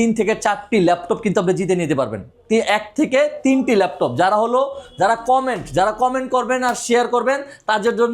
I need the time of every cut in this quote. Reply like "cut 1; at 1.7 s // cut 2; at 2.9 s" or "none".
none